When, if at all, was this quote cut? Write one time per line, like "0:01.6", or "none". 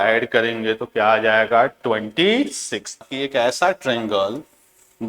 0:03.2